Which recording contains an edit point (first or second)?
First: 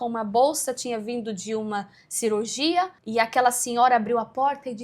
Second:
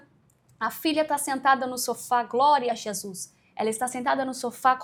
first